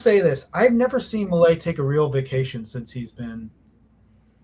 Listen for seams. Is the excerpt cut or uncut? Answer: uncut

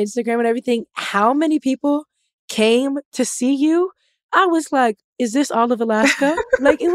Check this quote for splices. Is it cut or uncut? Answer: uncut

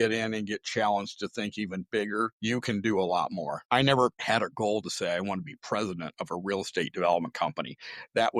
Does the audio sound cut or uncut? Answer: cut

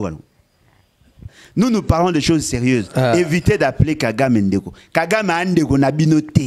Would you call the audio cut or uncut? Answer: cut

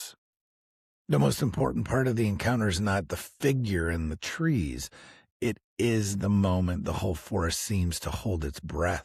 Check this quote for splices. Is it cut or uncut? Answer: uncut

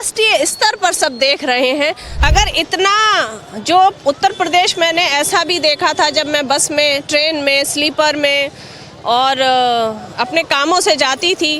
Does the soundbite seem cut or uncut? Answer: cut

